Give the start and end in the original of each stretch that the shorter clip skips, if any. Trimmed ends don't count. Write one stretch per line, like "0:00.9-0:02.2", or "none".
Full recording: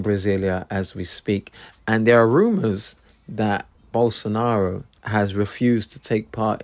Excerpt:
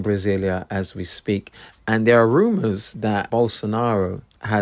0:03.1-0:03.7